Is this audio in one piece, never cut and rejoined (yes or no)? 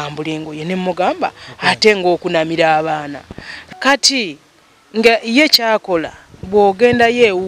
no